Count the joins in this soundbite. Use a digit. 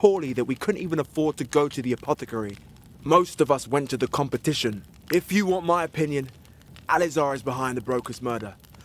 1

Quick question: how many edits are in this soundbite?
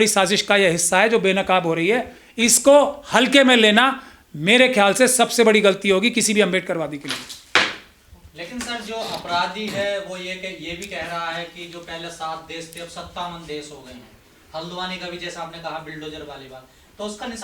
0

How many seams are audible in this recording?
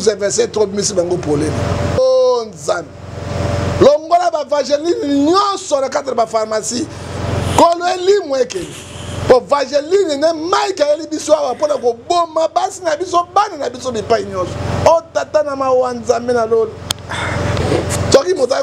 2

